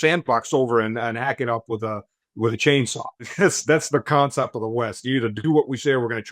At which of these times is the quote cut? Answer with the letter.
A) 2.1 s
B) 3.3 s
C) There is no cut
B